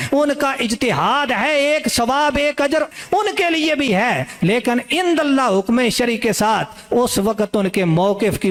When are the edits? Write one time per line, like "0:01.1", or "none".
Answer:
none